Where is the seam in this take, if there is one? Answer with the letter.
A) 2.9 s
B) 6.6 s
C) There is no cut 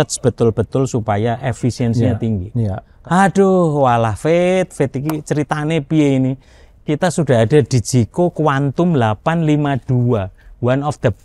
A